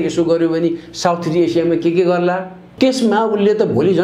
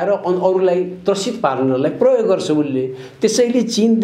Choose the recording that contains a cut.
first; 1 cut; at 2.6 s

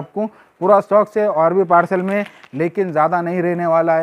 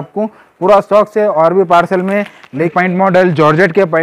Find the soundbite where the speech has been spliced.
second; 1 cut; at 2.7 s

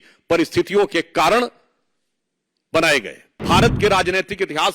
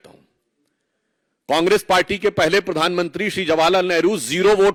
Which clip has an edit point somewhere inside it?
first; 1 cut; at 3.4 s

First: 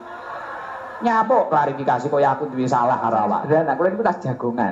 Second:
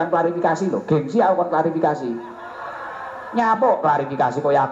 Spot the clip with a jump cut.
first; 1 cut; at 3.4 s

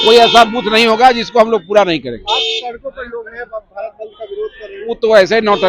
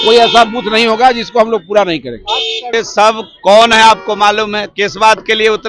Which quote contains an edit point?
second; 1 cut; at 2.7 s

